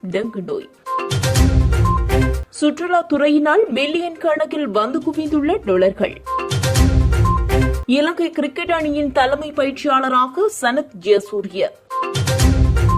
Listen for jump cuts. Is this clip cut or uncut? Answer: cut